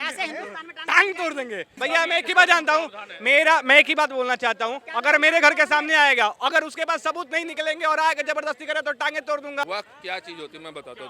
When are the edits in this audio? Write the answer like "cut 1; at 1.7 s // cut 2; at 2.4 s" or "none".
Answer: cut 1; at 1.8 s // cut 2; at 9.6 s